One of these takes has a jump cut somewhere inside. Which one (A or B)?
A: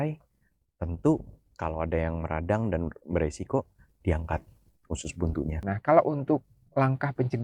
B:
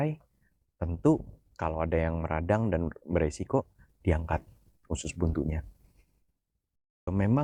A